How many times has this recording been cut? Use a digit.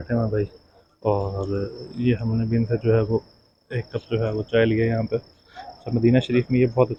0